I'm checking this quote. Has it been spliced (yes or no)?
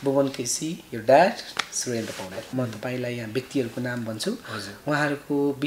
yes